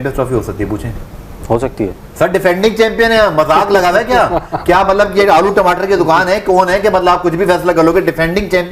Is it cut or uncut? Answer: uncut